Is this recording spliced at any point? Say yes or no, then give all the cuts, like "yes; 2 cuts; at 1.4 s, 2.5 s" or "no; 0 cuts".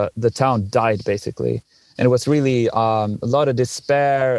no; 0 cuts